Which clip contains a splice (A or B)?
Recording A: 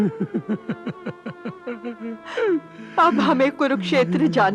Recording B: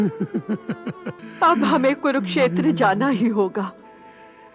B